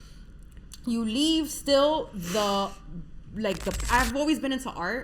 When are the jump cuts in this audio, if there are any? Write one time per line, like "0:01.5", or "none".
0:03.8